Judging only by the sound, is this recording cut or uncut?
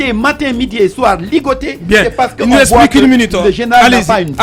uncut